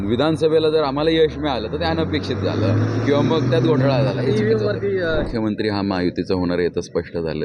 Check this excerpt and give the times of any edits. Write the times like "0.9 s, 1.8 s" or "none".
5.3 s